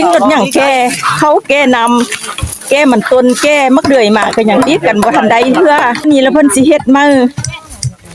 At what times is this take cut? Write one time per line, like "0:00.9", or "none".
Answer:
0:06.1